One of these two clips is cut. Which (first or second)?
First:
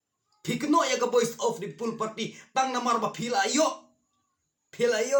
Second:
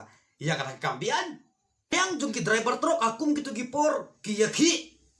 second